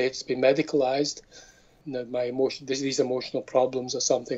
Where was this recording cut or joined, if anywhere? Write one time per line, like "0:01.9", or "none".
0:01.8